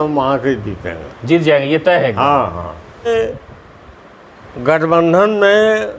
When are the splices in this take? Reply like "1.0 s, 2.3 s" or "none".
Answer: 3.1 s